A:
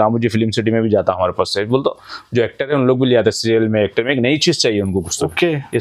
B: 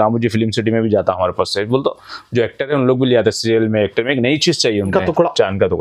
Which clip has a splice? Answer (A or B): B